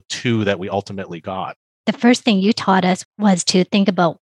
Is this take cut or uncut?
cut